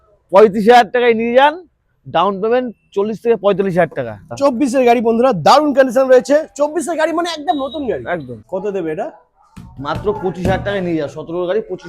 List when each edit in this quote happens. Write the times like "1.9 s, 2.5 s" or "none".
4.3 s, 8.4 s